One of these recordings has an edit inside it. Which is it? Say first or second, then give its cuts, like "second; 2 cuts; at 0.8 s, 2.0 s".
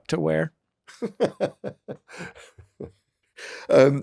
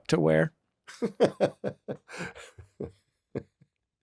first; 1 cut; at 3.1 s